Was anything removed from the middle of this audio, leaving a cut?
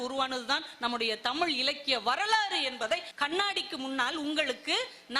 yes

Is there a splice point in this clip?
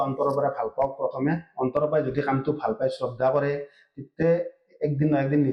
no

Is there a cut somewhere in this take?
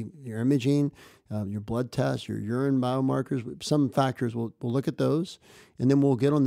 no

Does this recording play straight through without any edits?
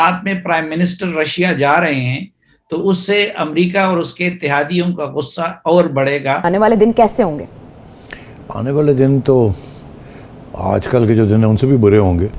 no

